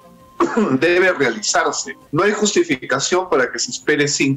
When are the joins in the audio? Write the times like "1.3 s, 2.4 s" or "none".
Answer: 1.9 s

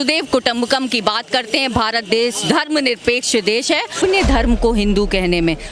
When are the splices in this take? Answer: 3.9 s

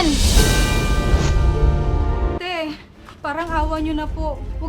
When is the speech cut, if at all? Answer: 2.4 s

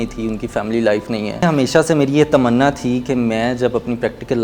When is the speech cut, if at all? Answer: 1.4 s

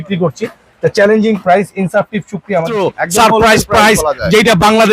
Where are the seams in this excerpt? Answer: 2.8 s

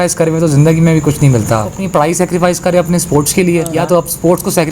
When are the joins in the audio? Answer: 1.8 s, 3.7 s

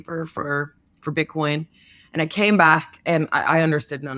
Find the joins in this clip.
none

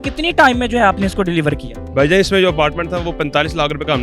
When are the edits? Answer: none

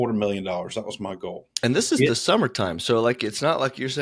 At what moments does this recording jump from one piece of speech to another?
1.4 s

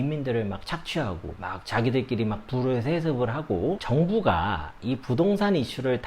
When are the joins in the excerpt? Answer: 3.8 s

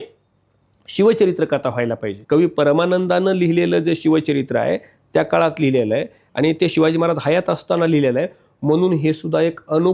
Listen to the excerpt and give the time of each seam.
2.1 s

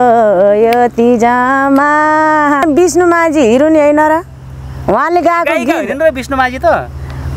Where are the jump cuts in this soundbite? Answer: 2.6 s

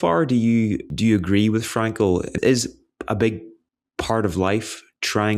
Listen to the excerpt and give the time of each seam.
0.9 s, 2.3 s

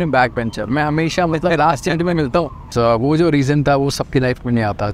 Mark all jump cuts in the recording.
2.7 s

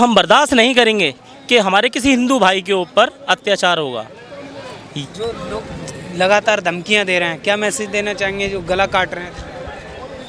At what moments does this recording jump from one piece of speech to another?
none

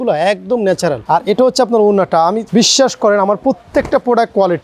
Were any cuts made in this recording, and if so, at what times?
1.0 s, 2.4 s

